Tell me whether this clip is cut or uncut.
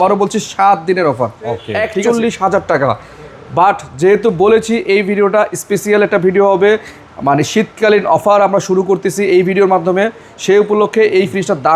cut